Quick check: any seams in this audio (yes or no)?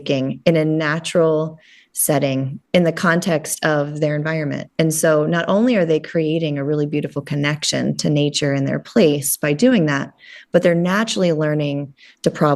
no